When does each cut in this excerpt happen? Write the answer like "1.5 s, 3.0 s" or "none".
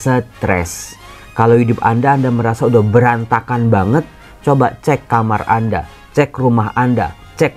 none